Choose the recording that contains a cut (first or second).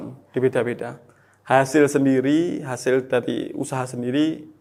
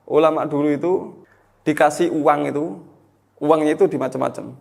second